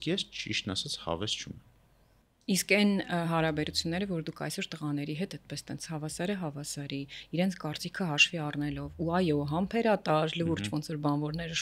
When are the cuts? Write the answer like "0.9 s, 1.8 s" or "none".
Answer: none